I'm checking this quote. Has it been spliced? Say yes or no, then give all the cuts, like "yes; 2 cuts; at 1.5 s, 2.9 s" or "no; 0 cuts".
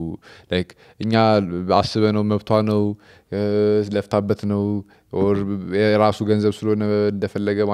no; 0 cuts